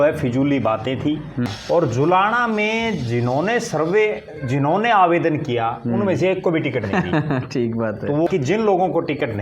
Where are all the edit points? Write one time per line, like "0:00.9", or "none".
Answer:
0:01.5
0:08.3